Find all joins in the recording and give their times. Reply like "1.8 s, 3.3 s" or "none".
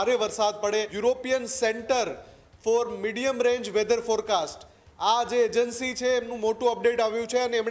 0.9 s